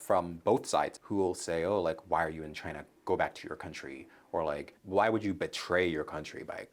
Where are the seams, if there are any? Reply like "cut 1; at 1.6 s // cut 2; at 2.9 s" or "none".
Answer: cut 1; at 1.0 s // cut 2; at 4.8 s